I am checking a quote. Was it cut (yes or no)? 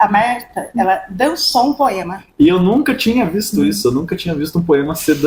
no